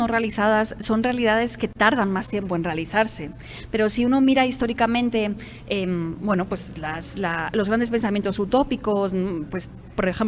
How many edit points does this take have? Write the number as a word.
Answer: zero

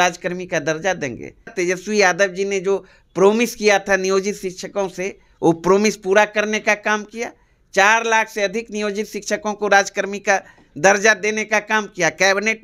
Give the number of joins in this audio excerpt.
one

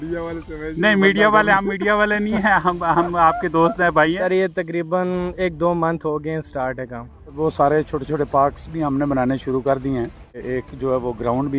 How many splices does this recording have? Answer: three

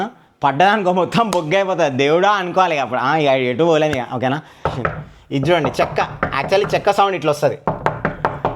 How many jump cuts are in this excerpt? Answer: one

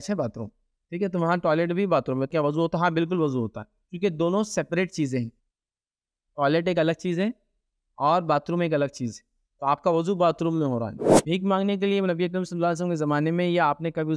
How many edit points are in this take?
two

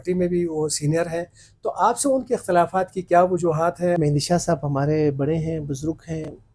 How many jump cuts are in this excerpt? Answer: one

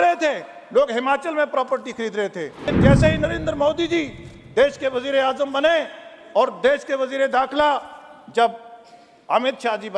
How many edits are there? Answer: one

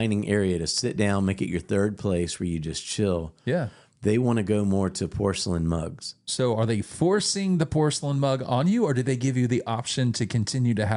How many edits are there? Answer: zero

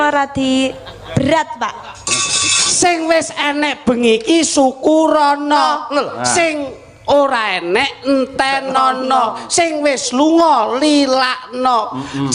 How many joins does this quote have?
one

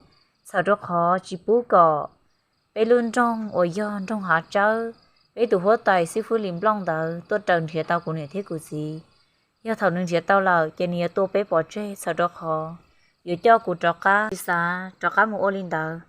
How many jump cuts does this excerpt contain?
one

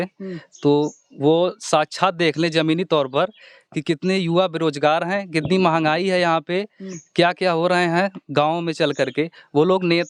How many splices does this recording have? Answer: zero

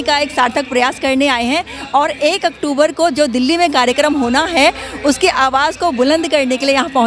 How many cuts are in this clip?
zero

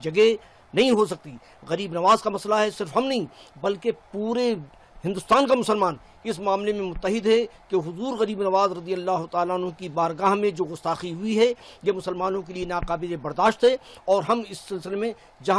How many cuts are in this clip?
zero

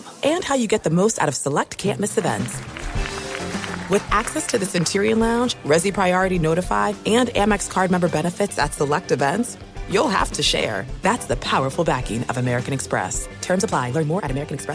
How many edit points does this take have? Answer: zero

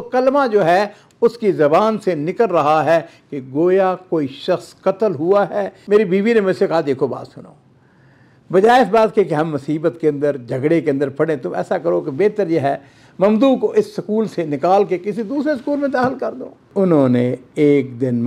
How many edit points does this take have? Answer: two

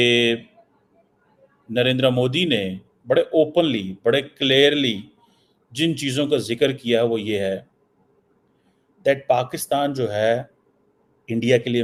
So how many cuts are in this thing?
zero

